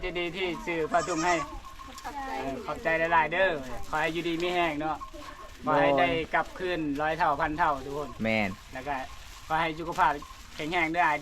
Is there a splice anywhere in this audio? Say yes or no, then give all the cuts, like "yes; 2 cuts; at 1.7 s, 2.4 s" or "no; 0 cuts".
no; 0 cuts